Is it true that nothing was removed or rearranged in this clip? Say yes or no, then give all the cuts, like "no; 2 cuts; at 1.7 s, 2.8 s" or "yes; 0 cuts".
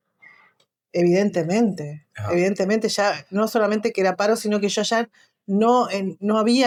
yes; 0 cuts